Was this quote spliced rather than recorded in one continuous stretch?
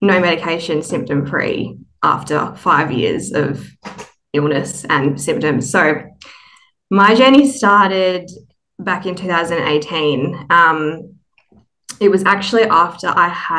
no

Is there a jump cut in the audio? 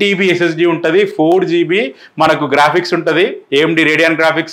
no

